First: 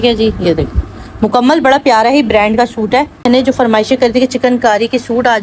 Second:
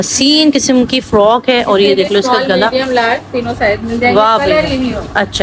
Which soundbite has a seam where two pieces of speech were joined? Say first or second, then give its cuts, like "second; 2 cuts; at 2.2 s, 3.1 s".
first; 1 cut; at 3.3 s